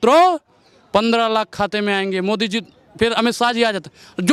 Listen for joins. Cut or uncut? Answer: uncut